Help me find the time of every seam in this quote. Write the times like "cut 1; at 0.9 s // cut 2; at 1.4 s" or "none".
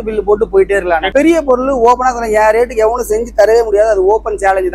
cut 1; at 1.1 s